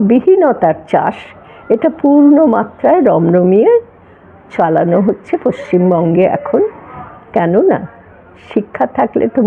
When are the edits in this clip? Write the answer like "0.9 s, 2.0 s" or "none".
none